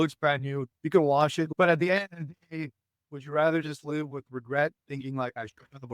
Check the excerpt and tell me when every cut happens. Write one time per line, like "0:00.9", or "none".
0:01.5